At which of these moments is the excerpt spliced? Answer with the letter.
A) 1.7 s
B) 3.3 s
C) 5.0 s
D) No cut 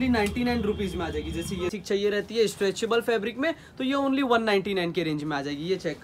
A